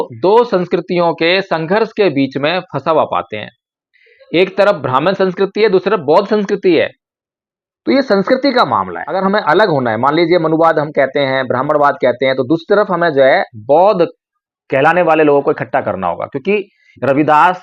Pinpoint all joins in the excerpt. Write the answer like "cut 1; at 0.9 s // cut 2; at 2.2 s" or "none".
cut 1; at 9.1 s